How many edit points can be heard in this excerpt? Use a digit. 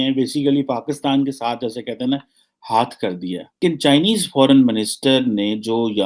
1